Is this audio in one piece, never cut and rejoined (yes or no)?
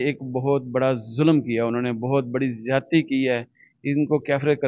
yes